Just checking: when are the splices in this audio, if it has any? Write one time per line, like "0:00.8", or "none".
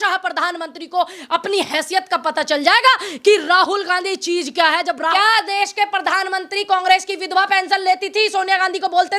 0:05.1